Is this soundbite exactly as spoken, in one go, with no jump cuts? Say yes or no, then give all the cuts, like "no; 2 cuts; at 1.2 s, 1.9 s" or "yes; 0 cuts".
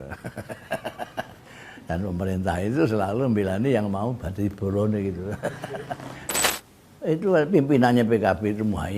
no; 1 cut; at 6.5 s